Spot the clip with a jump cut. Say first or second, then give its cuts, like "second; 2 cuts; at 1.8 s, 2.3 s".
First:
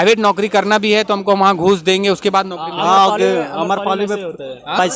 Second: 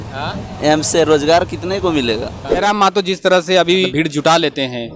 second; 2 cuts; at 2.6 s, 3.9 s